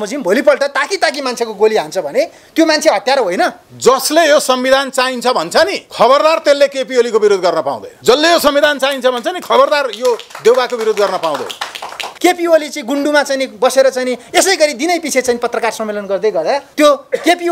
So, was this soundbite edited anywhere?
yes; 3 cuts; at 3.6 s, 12.1 s, 16.7 s

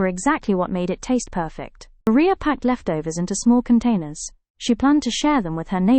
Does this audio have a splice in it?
yes; 1 cut; at 2.1 s

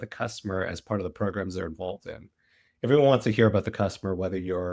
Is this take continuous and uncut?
yes; 0 cuts

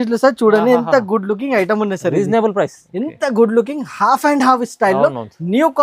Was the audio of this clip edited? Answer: yes; 1 cut; at 2.8 s

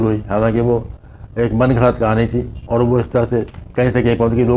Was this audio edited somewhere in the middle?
yes; 1 cut; at 2.5 s

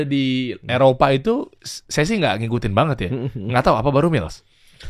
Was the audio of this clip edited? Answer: no; 0 cuts

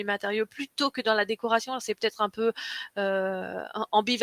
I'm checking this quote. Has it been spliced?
no; 0 cuts

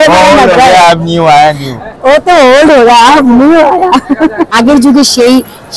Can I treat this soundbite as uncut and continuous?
no; 1 cut; at 4.5 s

